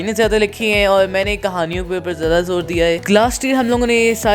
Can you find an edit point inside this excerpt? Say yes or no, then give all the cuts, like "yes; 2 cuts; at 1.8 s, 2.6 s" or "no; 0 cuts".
yes; 1 cut; at 3.0 s